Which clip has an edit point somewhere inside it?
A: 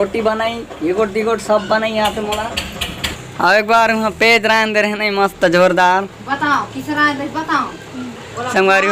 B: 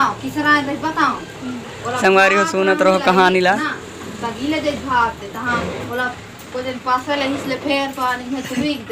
A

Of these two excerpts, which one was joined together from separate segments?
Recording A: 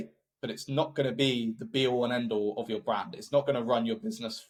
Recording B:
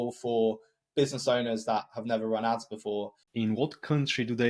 B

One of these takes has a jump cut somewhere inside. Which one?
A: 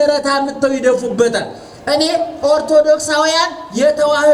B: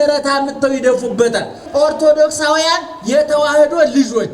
B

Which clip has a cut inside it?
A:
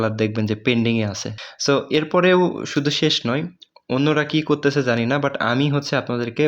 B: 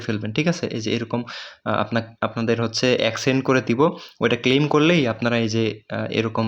A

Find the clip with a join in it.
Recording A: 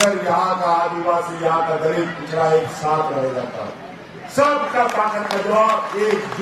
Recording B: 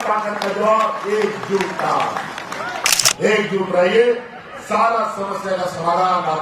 B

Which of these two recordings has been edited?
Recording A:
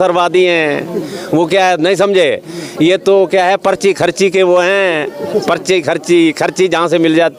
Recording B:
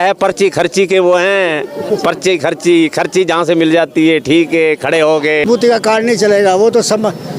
B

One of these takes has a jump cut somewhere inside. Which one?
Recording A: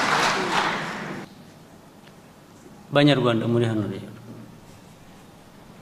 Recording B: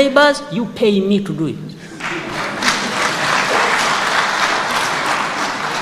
A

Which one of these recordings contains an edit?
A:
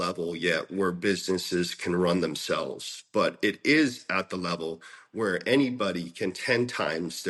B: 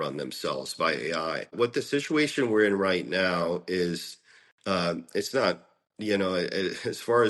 B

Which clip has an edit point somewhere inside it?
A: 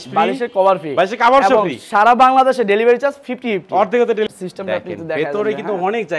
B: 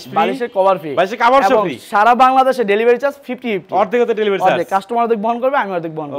A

